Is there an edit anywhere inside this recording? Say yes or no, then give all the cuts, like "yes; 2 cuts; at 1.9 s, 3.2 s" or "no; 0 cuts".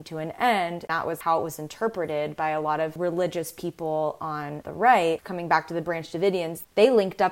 yes; 2 cuts; at 1.0 s, 5.2 s